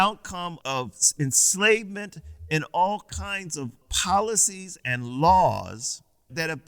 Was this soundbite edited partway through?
yes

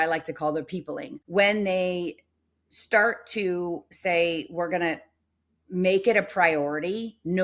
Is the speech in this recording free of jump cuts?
no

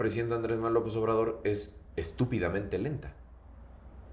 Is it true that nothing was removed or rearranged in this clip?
yes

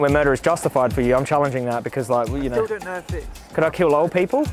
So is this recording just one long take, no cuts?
yes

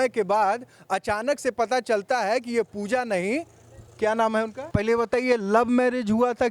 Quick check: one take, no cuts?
no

